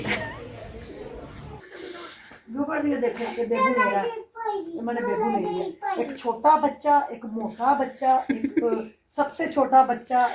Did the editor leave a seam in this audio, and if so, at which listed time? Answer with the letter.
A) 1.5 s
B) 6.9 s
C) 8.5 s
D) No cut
A